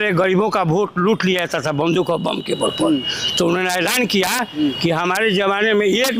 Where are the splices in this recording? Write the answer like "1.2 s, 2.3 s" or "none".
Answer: none